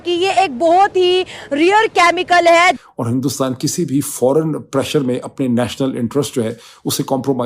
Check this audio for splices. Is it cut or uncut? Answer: cut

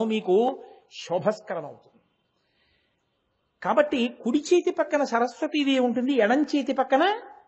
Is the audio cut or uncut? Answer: uncut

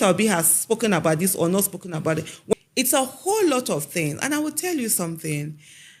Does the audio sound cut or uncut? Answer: cut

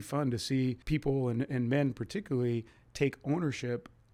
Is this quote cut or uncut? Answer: uncut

